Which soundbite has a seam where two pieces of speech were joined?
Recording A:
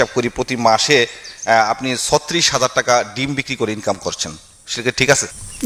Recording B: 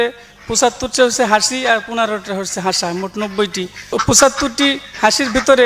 B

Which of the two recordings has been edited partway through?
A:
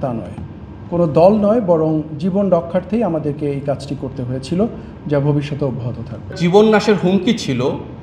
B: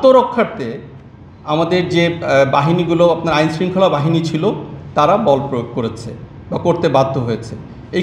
A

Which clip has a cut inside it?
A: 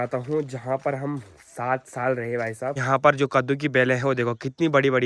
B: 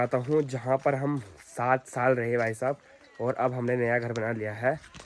A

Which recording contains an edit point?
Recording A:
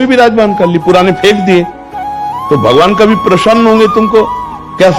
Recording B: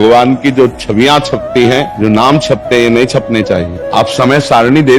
B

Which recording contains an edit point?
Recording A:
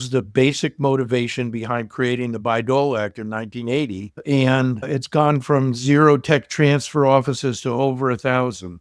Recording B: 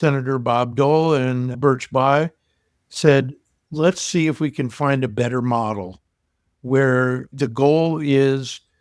A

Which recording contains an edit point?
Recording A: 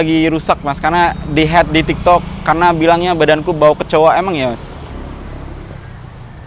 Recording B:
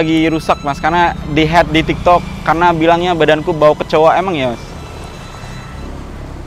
A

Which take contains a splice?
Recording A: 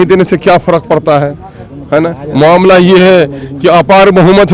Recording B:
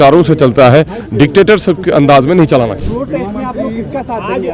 B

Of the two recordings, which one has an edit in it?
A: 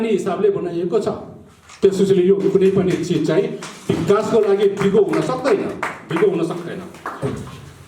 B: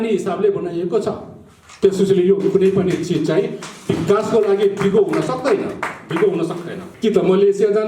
B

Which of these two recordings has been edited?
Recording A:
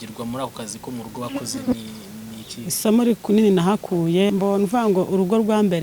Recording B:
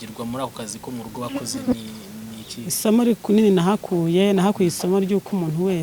A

